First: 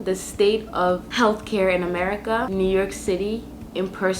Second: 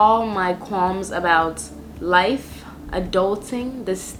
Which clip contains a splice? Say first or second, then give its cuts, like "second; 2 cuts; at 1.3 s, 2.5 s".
first; 1 cut; at 2.5 s